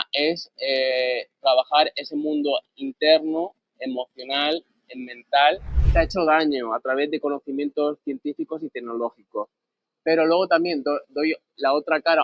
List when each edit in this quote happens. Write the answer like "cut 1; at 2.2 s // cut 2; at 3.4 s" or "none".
cut 1; at 5.7 s